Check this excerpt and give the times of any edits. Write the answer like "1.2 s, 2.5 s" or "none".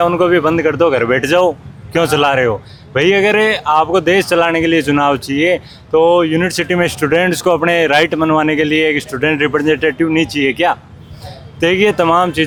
none